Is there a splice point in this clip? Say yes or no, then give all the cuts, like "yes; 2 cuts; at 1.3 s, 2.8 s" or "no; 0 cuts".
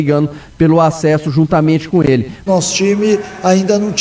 yes; 1 cut; at 2.4 s